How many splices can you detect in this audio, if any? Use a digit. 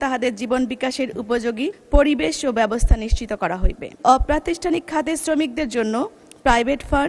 2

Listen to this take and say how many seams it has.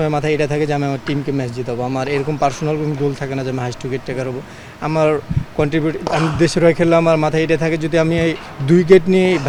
0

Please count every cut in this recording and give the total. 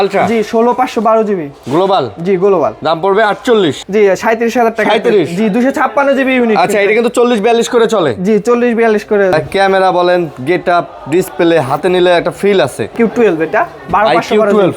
3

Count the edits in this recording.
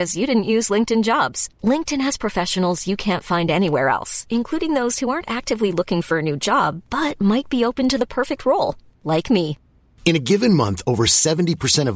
0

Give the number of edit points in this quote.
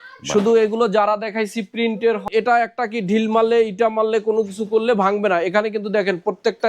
1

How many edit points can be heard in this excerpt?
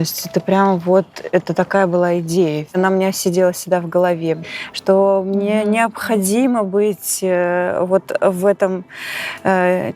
2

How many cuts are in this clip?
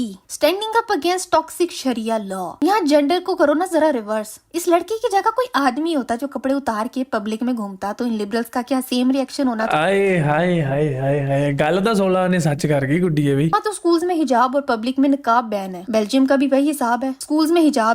1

